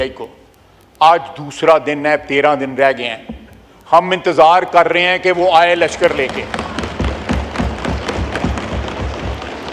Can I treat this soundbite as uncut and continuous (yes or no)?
yes